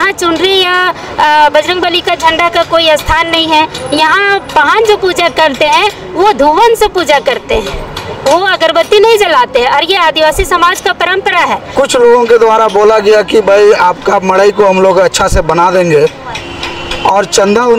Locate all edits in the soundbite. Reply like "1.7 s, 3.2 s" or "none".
11.7 s